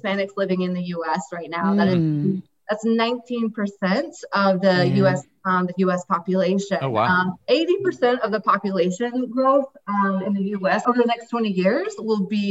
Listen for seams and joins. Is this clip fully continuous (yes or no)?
no